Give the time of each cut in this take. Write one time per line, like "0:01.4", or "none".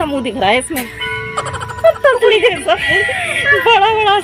none